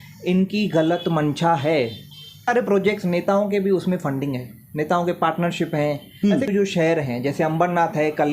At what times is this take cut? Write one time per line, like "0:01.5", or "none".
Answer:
0:02.5
0:06.5